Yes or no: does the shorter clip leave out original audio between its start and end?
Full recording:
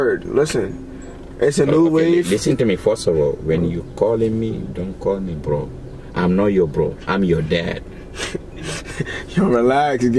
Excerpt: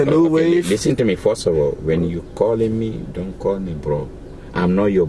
no